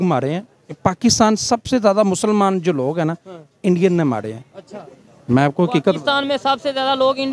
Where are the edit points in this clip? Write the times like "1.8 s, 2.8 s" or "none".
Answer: none